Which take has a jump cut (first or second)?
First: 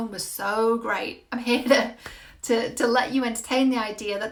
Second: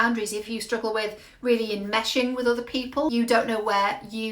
second